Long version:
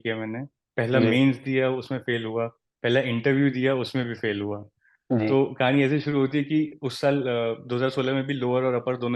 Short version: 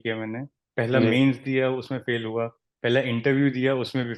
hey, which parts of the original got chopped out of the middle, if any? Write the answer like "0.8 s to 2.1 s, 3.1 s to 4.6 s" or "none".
none